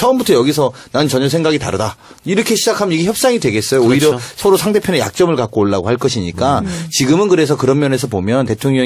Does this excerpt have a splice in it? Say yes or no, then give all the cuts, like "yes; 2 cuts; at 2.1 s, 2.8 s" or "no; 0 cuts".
yes; 1 cut; at 5.5 s